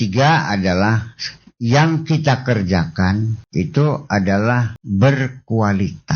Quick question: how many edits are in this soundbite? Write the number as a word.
two